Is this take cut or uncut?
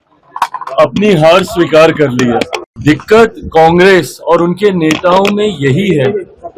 cut